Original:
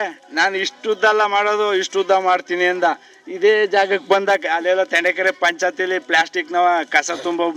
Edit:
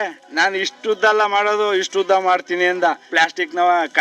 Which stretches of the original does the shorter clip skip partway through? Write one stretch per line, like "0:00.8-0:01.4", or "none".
0:03.1-0:06.0